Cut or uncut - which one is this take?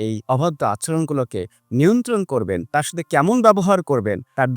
cut